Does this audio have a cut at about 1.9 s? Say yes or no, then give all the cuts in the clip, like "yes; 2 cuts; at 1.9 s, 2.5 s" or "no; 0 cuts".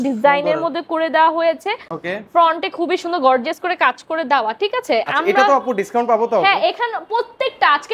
no; 0 cuts